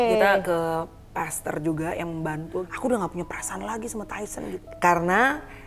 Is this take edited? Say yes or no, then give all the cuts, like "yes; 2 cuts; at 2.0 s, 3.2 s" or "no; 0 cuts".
yes; 2 cuts; at 2.5 s, 4.6 s